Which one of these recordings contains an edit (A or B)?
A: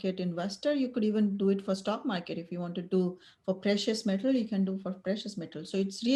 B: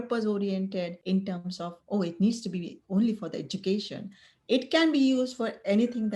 B